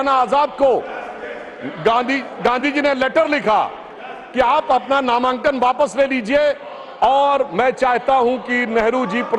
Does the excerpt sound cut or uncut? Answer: uncut